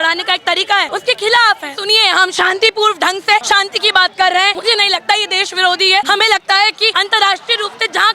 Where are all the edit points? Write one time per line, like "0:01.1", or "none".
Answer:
0:00.9
0:01.8
0:03.4
0:04.6
0:06.1
0:06.9